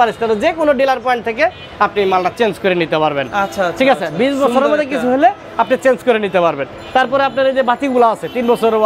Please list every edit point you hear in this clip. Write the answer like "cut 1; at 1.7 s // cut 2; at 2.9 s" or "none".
none

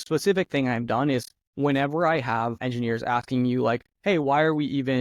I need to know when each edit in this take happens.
cut 1; at 2.6 s

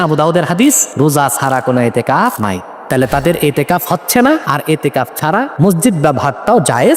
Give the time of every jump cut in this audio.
cut 1; at 0.9 s // cut 2; at 2.5 s // cut 3; at 4.4 s // cut 4; at 5.5 s

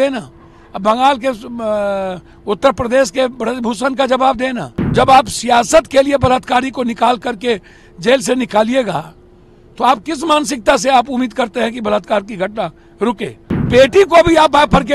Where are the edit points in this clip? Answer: cut 1; at 4.9 s // cut 2; at 13.7 s

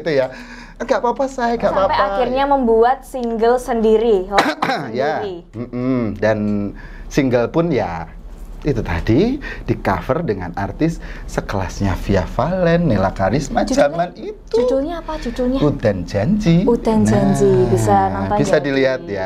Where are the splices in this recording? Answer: cut 1; at 2.0 s

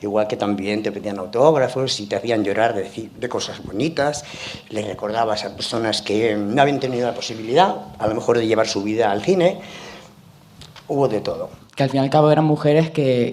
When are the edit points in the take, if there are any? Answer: cut 1; at 11.6 s

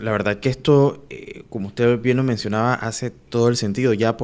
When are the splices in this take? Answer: none

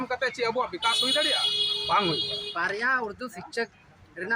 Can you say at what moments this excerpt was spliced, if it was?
cut 1; at 2.4 s

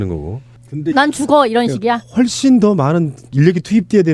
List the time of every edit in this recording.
none

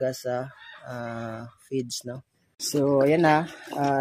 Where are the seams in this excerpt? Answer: cut 1; at 2.6 s

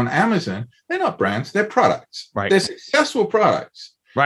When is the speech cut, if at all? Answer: none

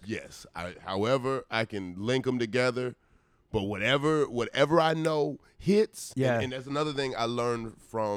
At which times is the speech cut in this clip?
cut 1; at 6.0 s

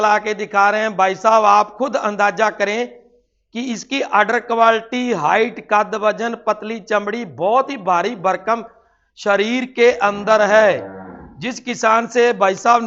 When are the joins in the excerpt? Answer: none

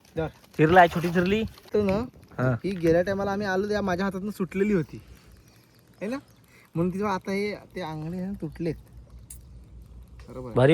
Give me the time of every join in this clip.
cut 1; at 1.6 s

